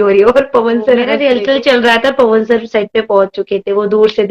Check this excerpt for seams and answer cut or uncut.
cut